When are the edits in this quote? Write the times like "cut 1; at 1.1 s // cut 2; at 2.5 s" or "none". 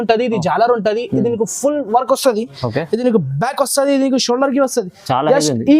none